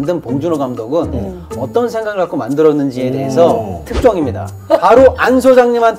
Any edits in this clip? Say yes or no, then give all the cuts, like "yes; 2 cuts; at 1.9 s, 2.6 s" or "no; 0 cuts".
no; 0 cuts